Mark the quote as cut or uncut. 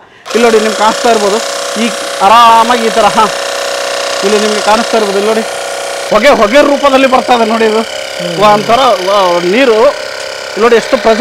cut